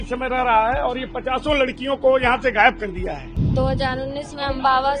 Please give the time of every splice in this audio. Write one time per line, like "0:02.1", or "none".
0:03.3